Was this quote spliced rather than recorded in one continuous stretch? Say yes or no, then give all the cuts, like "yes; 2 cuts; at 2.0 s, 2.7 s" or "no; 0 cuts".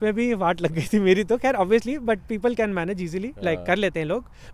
no; 0 cuts